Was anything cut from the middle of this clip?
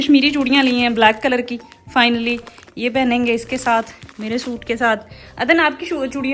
no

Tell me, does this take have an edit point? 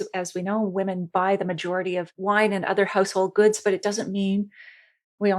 yes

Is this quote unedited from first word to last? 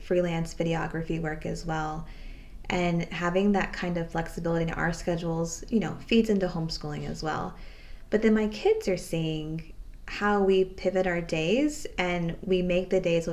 yes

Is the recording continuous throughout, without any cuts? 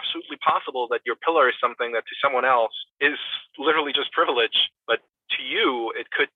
no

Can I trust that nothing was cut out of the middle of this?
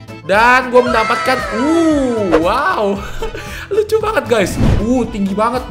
no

